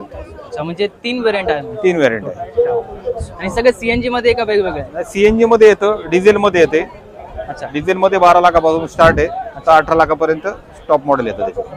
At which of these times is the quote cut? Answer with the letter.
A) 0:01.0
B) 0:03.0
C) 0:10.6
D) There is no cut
D